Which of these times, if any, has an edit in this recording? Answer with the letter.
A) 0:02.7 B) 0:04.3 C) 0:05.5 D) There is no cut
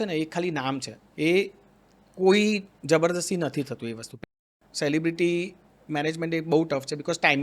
B